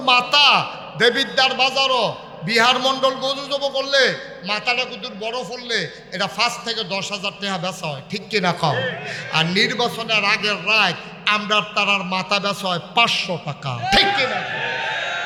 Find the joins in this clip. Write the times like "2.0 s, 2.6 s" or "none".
none